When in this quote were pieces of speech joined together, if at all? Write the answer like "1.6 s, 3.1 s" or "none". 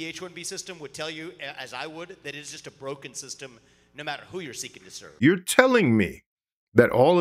5.0 s